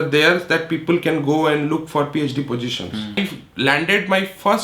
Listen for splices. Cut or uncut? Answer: cut